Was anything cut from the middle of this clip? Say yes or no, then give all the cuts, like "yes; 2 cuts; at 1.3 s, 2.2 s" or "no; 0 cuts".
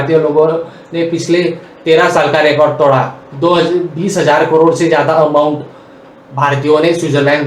no; 0 cuts